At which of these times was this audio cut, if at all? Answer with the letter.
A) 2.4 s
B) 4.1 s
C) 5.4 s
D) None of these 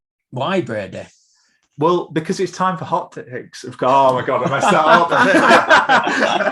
D